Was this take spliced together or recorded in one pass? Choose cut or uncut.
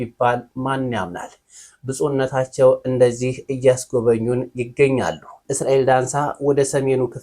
cut